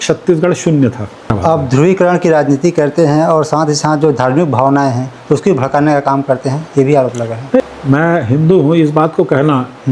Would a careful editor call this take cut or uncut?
cut